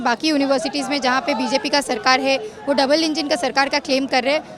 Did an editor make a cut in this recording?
no; 0 cuts

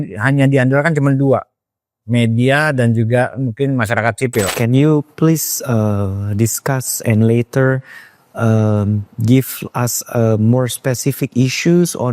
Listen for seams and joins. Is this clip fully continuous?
no; 1 cut; at 4.5 s

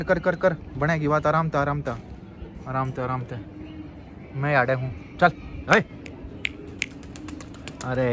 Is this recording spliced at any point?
no; 0 cuts

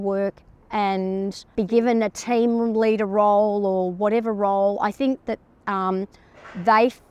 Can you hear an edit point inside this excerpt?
no; 0 cuts

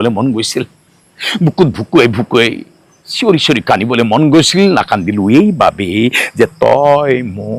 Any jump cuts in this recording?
no; 0 cuts

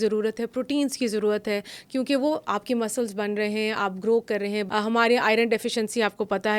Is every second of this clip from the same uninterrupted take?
no; 1 cut; at 4.7 s

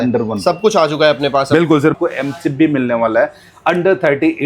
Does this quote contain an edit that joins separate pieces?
yes; 1 cut; at 1.9 s

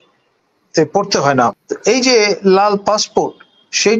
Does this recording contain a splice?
yes; 1 cut; at 1.7 s

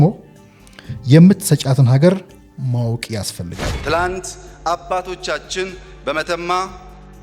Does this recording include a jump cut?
yes; 1 cut; at 3.7 s

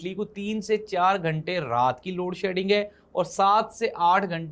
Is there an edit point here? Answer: no; 0 cuts

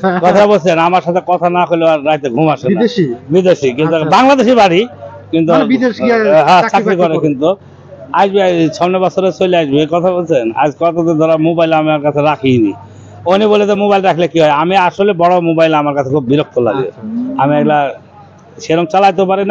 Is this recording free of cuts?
yes; 0 cuts

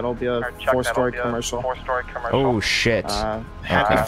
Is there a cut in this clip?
no; 0 cuts

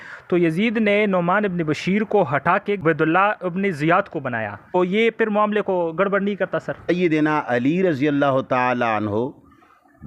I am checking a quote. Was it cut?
yes; 3 cuts; at 2.8 s, 4.8 s, 6.9 s

